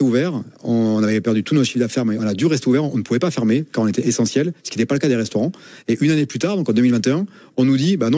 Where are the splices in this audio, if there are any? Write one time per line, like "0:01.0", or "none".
none